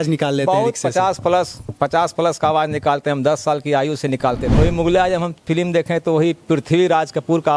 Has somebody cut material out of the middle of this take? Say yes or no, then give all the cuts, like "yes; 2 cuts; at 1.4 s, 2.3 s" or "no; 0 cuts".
yes; 1 cut; at 4.5 s